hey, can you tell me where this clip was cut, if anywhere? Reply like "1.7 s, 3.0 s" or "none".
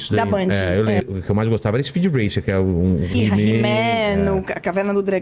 1.0 s, 3.1 s